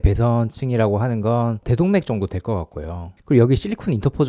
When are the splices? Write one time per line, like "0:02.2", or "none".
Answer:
0:03.1